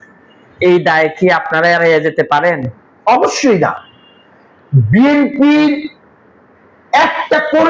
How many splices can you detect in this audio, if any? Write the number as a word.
zero